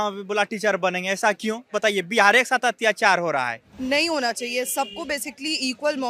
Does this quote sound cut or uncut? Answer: cut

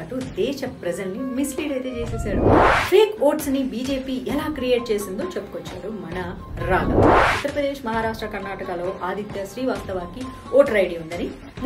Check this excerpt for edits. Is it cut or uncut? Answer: cut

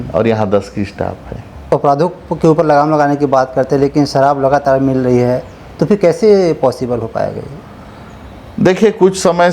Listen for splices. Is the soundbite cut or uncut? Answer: cut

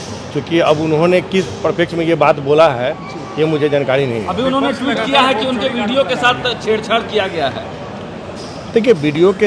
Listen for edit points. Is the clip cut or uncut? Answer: uncut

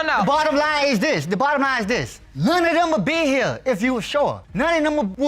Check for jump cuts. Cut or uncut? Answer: uncut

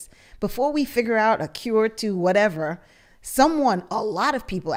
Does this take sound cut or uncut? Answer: uncut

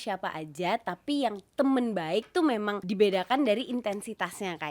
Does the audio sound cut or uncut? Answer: cut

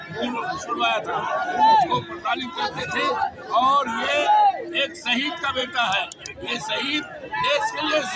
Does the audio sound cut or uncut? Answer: uncut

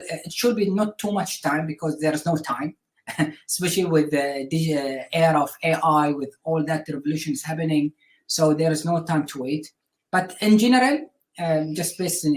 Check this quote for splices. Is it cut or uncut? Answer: uncut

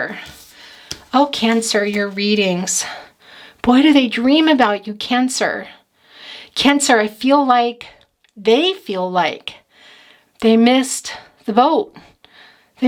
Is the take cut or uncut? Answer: uncut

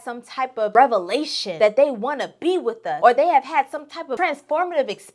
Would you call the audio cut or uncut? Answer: cut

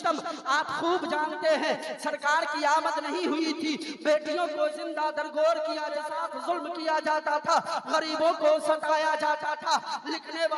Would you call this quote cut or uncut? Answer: cut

